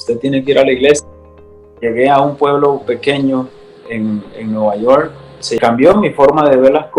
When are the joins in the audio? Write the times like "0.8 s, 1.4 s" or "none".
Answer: 1.7 s, 5.6 s